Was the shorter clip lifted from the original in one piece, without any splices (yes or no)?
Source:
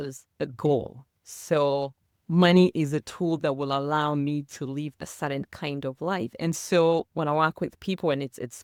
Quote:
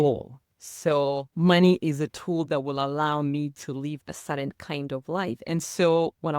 no